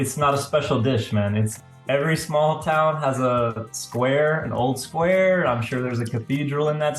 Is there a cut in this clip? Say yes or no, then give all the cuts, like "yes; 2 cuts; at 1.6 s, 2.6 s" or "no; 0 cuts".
yes; 1 cut; at 1.6 s